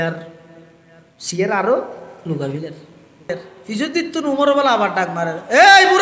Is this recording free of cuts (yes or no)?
no